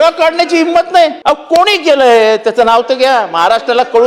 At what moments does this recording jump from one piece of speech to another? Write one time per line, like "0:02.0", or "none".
0:01.2